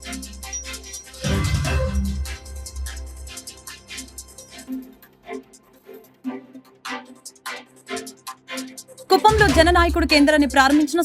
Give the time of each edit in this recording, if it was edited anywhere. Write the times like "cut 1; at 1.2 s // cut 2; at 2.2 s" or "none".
cut 1; at 2.1 s